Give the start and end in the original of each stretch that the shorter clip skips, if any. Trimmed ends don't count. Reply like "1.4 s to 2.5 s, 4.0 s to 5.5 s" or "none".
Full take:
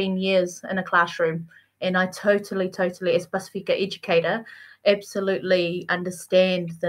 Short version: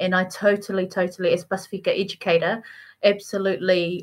none